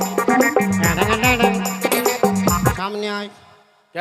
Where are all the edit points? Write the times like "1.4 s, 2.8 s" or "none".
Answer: 2.8 s